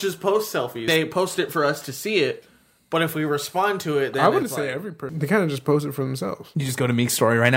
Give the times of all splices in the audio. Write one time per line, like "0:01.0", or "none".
0:00.8
0:05.0
0:06.5